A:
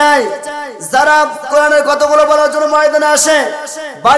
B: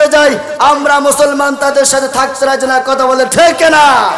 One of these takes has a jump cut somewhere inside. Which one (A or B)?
A